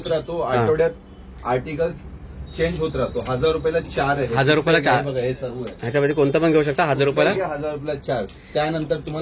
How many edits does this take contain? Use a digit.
0